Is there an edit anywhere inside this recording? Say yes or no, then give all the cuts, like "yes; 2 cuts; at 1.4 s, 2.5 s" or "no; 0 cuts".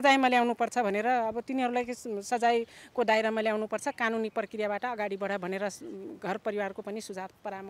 no; 0 cuts